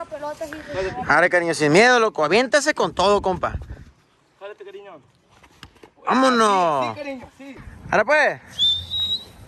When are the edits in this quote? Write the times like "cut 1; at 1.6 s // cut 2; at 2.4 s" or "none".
cut 1; at 7.5 s